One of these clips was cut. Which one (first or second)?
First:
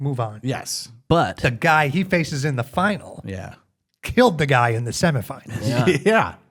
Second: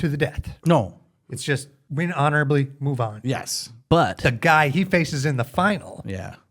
second